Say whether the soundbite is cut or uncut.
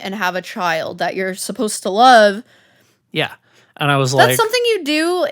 cut